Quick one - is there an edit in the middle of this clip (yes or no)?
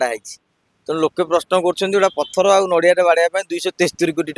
no